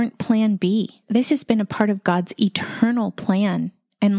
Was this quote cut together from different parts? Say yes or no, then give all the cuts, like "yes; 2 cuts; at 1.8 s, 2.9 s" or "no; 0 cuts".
yes; 1 cut; at 1.0 s